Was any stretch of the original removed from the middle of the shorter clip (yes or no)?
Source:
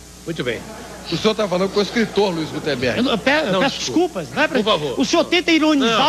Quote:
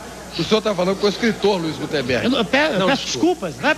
no